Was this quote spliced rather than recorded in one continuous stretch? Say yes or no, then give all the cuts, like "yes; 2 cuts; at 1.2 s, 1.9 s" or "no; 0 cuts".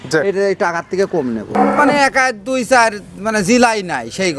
yes; 1 cut; at 1.5 s